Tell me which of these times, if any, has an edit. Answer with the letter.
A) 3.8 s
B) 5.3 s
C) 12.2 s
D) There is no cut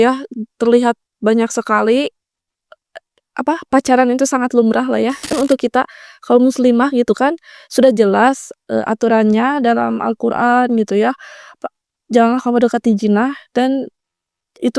B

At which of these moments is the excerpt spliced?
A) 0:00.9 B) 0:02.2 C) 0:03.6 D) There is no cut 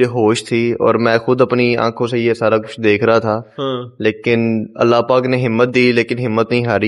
D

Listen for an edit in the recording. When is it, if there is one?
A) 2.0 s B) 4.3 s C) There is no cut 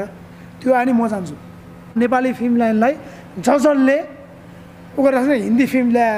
A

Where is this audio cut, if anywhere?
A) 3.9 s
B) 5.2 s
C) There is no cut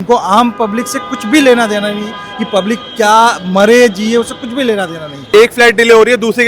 B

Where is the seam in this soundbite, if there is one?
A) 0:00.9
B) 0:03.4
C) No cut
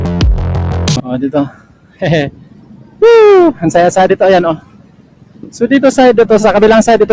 A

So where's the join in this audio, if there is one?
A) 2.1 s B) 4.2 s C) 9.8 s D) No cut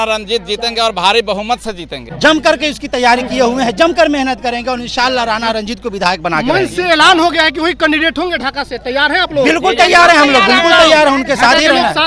A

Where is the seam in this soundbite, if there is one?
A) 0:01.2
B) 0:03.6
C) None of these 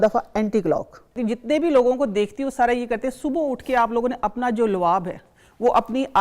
A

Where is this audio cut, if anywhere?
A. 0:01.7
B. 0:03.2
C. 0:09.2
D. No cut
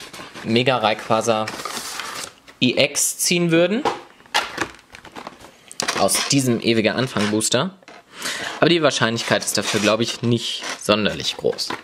C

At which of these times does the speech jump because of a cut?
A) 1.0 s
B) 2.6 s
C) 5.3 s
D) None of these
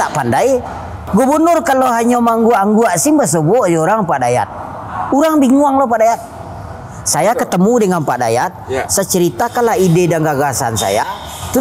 A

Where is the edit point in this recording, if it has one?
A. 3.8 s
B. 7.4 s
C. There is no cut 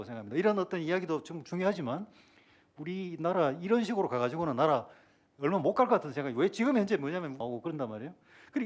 B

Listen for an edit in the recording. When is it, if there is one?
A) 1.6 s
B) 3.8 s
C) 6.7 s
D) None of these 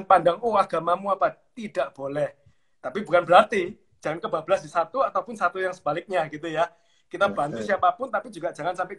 D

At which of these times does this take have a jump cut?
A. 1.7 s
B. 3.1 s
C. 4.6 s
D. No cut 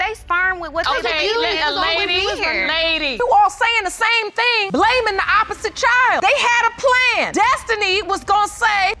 B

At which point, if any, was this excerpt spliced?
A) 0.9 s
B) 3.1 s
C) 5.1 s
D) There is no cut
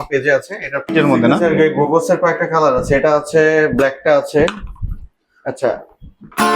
A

